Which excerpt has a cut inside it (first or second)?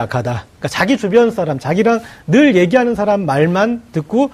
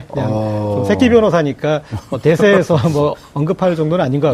second